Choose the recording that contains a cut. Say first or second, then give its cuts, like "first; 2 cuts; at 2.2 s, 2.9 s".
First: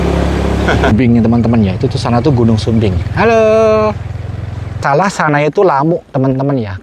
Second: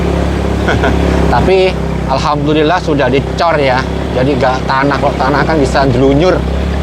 first; 2 cuts; at 0.9 s, 4.8 s